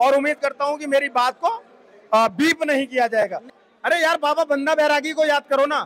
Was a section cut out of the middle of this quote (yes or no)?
yes